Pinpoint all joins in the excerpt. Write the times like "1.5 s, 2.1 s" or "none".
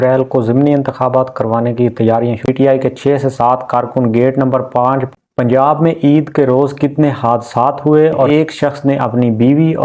2.5 s, 5.2 s, 8.3 s